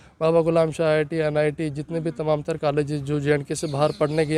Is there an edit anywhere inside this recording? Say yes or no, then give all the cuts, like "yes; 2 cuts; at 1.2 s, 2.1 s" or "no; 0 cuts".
no; 0 cuts